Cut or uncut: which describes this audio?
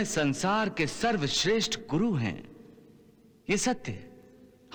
uncut